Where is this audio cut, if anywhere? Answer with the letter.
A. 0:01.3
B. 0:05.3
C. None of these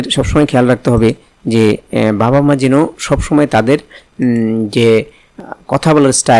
B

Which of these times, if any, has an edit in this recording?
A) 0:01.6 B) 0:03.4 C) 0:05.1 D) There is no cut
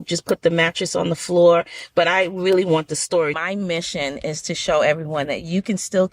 B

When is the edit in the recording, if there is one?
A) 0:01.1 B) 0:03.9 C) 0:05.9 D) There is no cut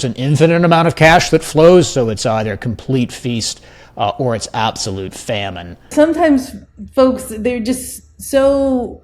C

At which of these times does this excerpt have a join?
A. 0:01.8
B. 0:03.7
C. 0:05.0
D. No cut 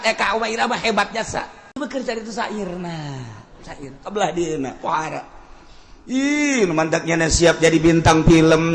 A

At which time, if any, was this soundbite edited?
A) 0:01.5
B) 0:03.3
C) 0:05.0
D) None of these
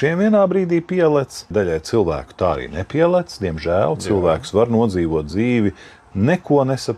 A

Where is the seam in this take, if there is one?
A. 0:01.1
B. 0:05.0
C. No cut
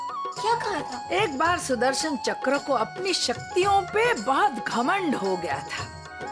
A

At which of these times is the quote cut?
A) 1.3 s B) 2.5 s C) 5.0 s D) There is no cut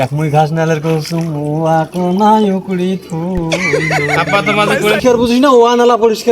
C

